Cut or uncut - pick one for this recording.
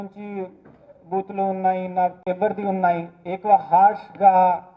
cut